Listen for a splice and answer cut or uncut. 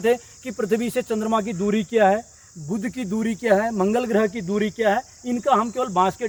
uncut